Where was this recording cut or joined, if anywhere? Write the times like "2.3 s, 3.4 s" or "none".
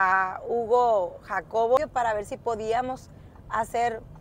1.8 s